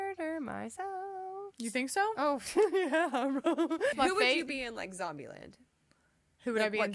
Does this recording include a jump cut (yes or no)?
yes